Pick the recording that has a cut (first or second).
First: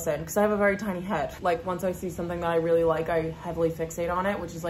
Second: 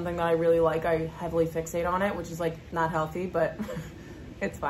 first